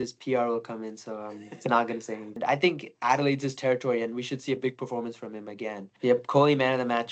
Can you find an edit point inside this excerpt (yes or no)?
yes